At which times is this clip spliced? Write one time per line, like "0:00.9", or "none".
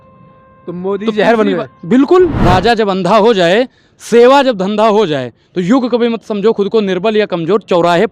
0:02.4